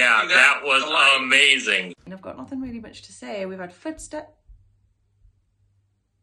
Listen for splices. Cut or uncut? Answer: cut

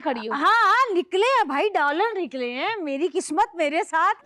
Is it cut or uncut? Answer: uncut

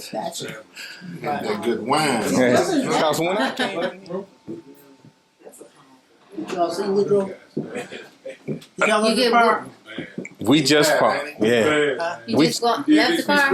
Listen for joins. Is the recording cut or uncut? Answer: cut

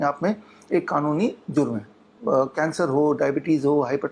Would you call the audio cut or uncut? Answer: cut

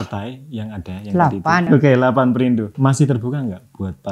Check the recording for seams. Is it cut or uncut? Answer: cut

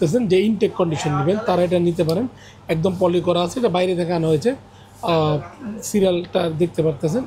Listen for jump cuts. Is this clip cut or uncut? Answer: uncut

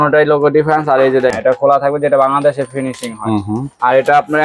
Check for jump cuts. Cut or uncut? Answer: cut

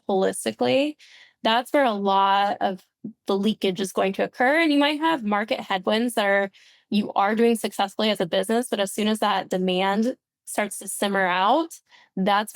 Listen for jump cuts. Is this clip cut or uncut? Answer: uncut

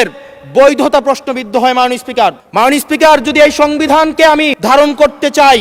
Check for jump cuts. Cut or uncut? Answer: cut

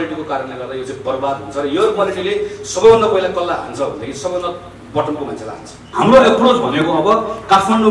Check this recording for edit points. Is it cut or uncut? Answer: cut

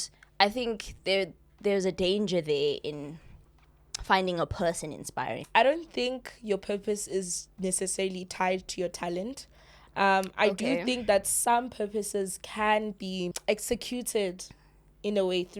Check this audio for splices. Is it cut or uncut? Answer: cut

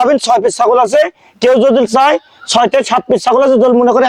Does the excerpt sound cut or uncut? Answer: uncut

